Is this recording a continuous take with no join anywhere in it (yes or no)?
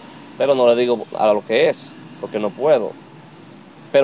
yes